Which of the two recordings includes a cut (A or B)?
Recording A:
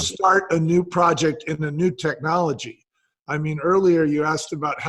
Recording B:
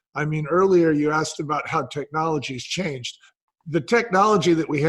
B